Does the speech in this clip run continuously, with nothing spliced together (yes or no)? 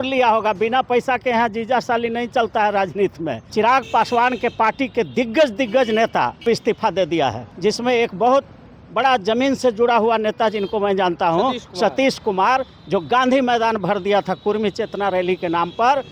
no